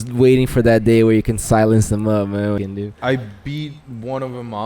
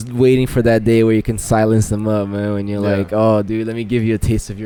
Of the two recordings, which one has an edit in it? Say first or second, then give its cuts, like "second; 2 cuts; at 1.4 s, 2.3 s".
first; 1 cut; at 2.6 s